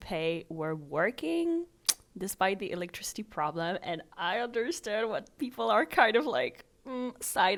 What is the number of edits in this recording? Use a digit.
0